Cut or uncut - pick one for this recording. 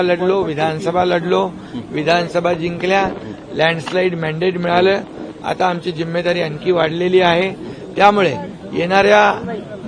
uncut